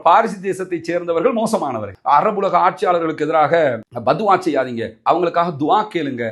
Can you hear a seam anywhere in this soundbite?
yes; 1 cut; at 1.9 s

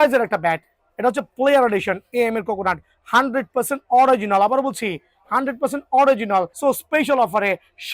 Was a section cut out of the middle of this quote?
yes; 1 cut; at 6.5 s

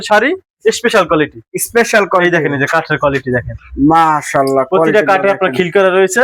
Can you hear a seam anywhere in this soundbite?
no; 0 cuts

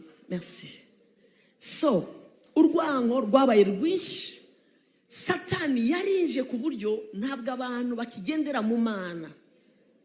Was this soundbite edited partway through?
no; 0 cuts

